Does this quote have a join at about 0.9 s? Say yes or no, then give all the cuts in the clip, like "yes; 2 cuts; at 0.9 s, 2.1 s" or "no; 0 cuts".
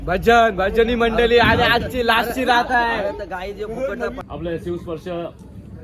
no; 1 cut; at 4.2 s